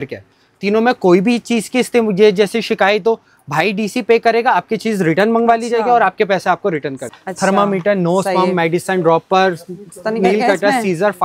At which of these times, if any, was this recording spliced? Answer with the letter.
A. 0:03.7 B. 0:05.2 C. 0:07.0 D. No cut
C